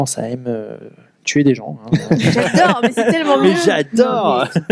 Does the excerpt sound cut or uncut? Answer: uncut